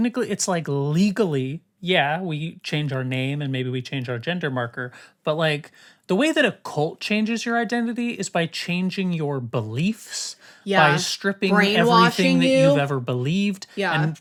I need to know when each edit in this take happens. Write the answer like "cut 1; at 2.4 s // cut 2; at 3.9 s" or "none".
none